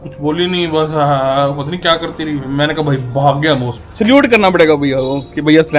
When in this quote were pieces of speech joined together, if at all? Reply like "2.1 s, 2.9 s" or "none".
3.8 s